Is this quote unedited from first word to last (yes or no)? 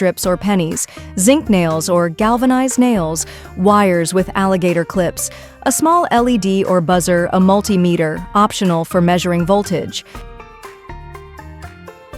no